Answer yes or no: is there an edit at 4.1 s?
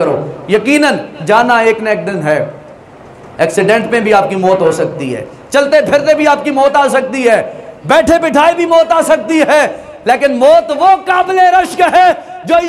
no